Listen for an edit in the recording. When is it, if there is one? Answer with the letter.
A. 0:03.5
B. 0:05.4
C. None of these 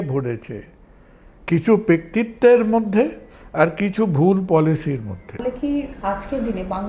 B